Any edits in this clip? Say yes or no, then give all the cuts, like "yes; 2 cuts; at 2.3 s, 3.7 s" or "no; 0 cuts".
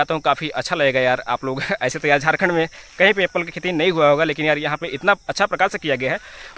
no; 0 cuts